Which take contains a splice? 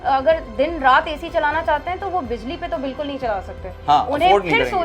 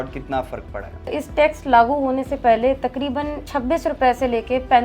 second; 2 cuts; at 1.1 s, 3.4 s

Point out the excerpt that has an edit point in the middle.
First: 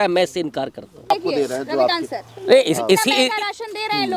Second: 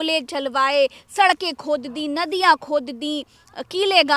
first; 1 cut; at 1.1 s

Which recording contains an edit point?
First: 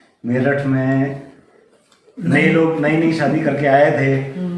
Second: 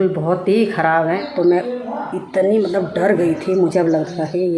second; 1 cut; at 1.2 s

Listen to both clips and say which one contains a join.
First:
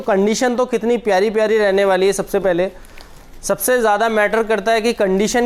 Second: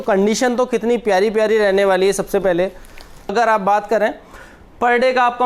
second; 1 cut; at 3.3 s

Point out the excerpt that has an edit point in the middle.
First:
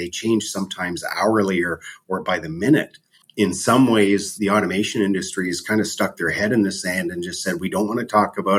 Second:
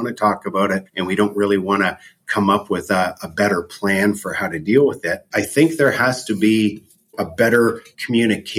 first; 1 cut; at 3.2 s

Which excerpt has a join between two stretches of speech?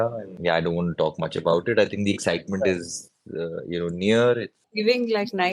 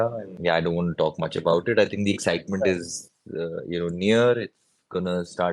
first; 1 cut; at 4.6 s

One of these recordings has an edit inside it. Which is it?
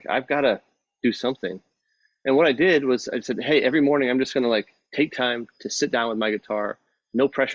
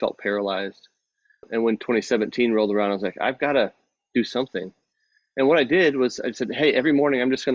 second; 1 cut; at 1.5 s

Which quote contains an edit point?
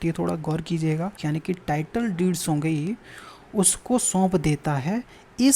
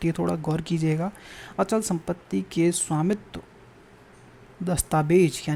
first; 1 cut; at 1.2 s

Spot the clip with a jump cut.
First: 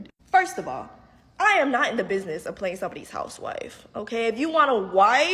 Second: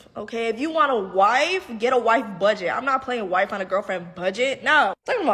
second; 1 cut; at 3.5 s

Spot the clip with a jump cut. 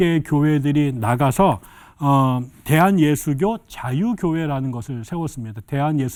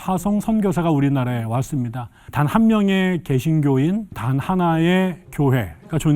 second; 3 cuts; at 2.2 s, 4.2 s, 5.2 s

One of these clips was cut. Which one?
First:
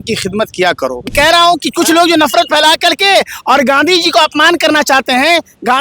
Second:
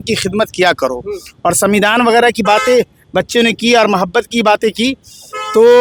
first; 1 cut; at 1.1 s

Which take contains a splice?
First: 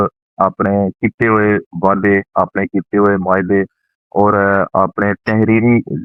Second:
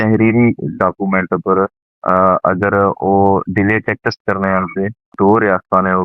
second; 1 cut; at 5.1 s

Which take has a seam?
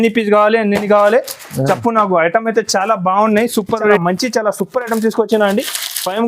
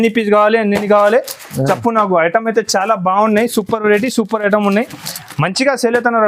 first; 1 cut; at 4.0 s

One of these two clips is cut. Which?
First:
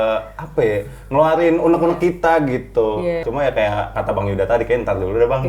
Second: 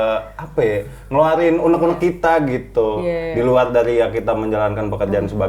first; 1 cut; at 3.2 s

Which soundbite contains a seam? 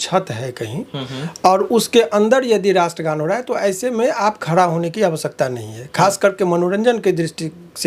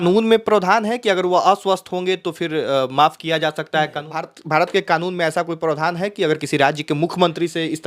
second; 1 cut; at 4.4 s

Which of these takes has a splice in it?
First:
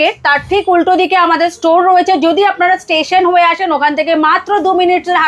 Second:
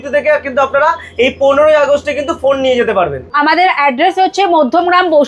second; 1 cut; at 3.2 s

